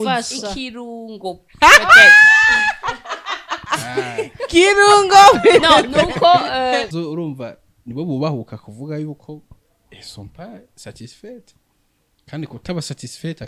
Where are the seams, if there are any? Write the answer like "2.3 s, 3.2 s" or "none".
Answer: 6.9 s